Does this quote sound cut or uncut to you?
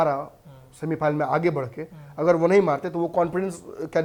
uncut